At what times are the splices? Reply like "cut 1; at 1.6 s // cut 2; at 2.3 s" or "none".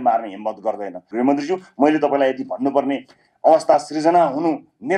cut 1; at 1.0 s